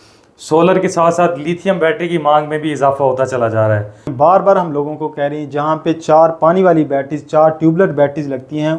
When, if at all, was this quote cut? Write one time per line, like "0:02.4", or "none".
0:04.1